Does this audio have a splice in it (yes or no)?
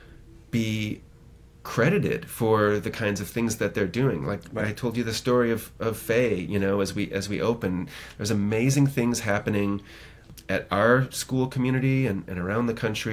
yes